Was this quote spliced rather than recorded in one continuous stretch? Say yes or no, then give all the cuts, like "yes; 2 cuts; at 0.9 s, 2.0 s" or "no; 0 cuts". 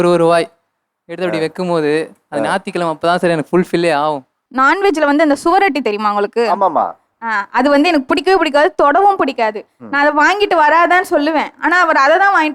yes; 1 cut; at 4.4 s